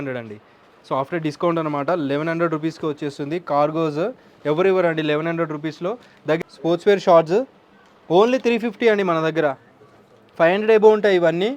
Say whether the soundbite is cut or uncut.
cut